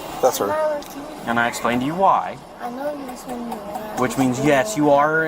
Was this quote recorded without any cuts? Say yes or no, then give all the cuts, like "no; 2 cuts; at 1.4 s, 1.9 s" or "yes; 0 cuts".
no; 2 cuts; at 1.1 s, 2.5 s